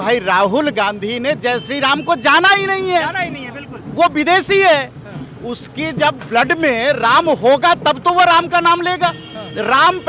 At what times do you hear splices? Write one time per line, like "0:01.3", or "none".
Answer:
none